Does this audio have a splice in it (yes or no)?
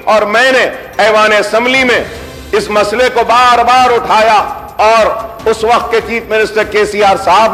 no